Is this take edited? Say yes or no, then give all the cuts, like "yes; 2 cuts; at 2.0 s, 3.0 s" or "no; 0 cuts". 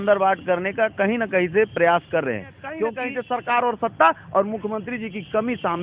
yes; 1 cut; at 3.1 s